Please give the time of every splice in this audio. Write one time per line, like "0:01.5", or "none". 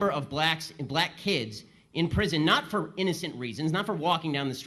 none